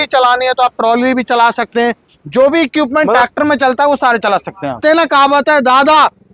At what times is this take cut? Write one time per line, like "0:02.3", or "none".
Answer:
0:04.8